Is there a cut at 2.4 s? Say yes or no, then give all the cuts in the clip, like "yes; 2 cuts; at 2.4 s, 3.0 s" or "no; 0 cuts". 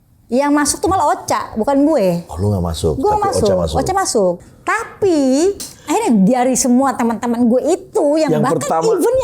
no; 2 cuts; at 4.5 s, 5.7 s